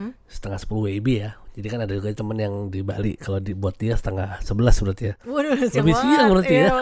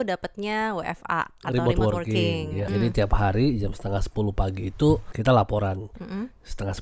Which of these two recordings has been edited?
second; 2 cuts; at 2.6 s, 5.1 s

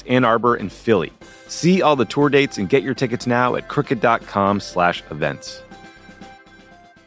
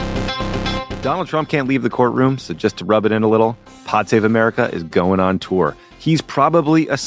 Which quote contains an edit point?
second; 1 cut; at 0.9 s

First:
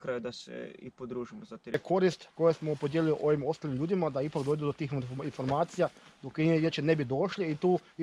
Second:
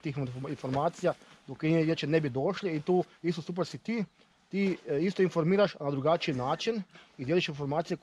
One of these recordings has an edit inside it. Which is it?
first; 1 cut; at 1.7 s

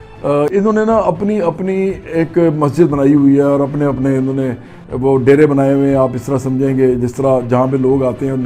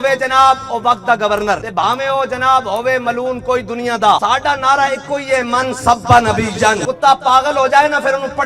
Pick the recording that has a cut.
second; 3 cuts; at 1.7 s, 4.2 s, 6.8 s

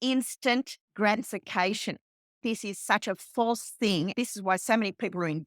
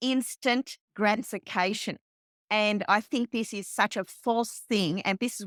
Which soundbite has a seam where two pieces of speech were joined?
first; 2 cuts; at 2.4 s, 4.1 s

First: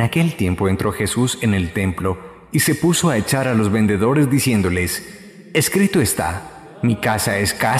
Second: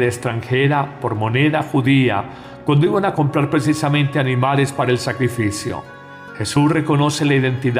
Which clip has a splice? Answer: second; 1 cut; at 6.8 s

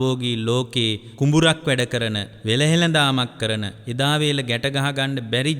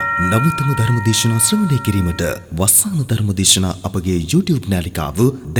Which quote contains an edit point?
first; 3 cuts; at 1.0 s, 2.3 s, 3.8 s

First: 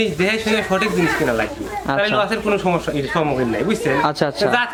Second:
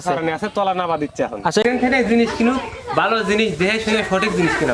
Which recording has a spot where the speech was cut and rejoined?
second; 1 cut; at 1.6 s

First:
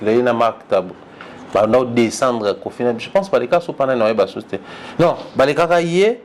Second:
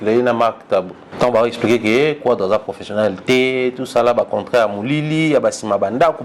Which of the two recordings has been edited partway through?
second; 1 cut; at 1.0 s

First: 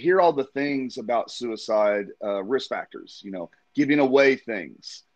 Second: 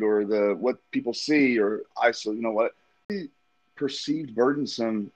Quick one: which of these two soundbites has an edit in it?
second; 1 cut; at 3.1 s

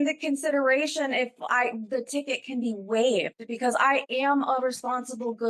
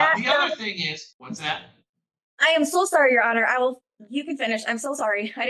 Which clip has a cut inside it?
second; 1 cut; at 1.1 s

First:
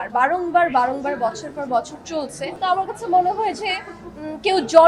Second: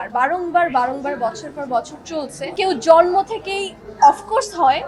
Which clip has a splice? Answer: second; 1 cut; at 2.5 s

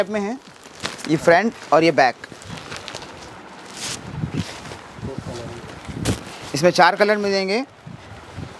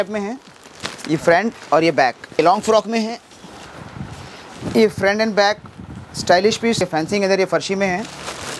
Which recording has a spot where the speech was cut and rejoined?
second; 2 cuts; at 2.4 s, 6.8 s

